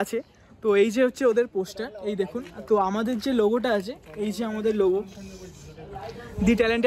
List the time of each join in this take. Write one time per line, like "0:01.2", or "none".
none